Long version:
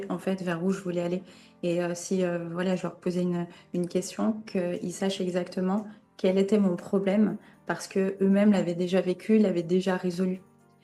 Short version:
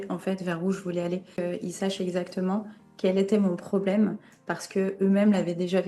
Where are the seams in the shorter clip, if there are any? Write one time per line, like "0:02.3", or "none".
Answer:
0:01.4